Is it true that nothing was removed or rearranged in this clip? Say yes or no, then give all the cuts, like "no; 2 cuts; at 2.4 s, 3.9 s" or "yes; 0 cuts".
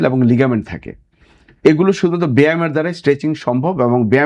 yes; 0 cuts